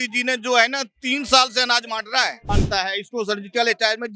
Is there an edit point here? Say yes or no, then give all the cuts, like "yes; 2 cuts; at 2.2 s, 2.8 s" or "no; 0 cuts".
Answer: yes; 1 cut; at 2.5 s